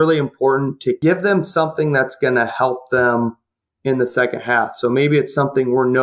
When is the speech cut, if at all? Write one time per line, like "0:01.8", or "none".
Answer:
0:01.0